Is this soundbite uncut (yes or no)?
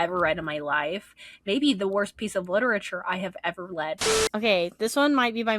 no